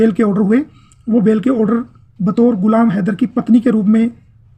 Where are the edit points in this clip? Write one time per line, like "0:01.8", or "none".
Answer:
none